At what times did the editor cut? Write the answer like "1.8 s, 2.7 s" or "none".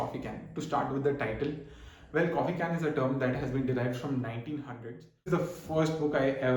5.3 s